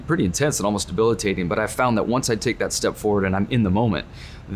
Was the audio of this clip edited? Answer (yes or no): no